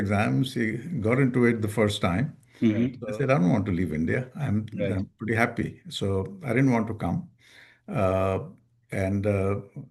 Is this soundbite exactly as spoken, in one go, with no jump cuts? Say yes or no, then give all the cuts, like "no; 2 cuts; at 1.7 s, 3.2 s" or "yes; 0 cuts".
no; 1 cut; at 3.0 s